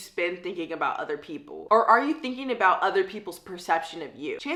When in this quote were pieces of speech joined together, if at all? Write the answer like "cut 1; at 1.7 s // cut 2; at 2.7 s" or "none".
none